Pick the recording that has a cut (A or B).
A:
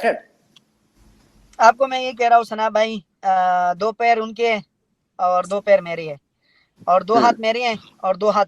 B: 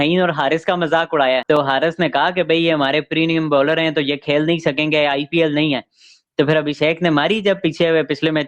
B